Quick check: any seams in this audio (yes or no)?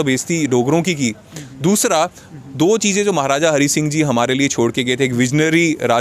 no